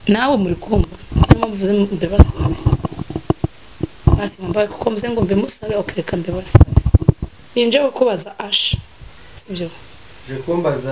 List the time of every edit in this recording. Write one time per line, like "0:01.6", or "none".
0:07.3